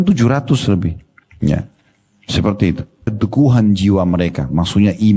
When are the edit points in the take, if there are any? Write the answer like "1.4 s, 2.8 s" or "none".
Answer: 3.1 s